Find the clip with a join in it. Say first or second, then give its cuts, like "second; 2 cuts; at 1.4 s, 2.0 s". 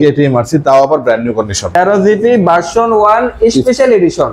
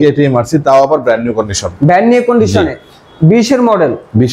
first; 1 cut; at 1.6 s